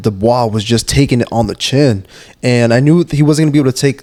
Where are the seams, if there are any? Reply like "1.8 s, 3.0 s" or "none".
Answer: none